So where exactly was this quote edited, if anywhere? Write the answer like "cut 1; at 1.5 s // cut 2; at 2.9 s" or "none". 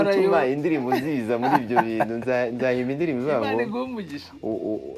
none